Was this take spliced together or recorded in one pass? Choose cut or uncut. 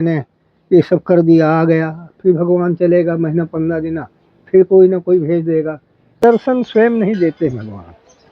cut